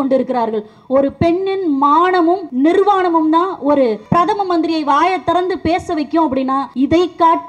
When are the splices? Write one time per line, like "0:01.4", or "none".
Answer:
0:02.5
0:04.0
0:06.7